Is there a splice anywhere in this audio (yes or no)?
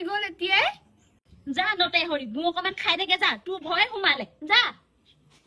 no